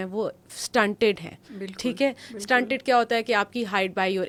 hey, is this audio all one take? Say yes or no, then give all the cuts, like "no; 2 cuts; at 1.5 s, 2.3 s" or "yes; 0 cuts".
yes; 0 cuts